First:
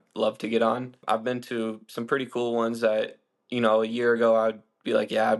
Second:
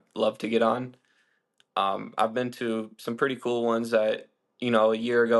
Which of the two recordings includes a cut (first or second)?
first